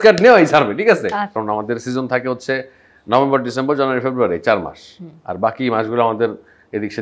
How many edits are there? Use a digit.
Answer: 1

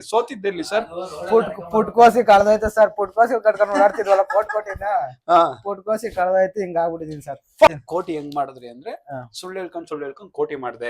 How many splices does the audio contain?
1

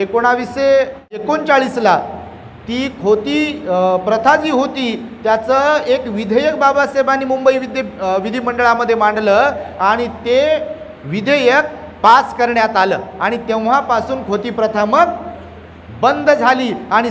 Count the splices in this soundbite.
1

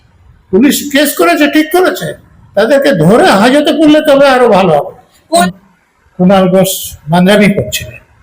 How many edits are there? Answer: 1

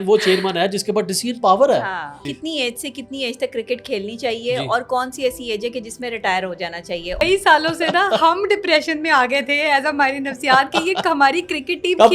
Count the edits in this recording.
2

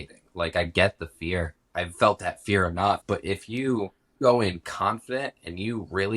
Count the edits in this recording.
3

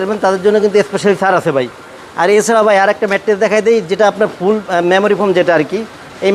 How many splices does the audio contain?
0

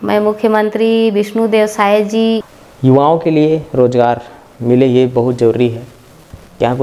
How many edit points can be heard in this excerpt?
1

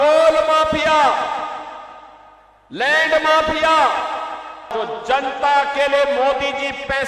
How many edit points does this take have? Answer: 1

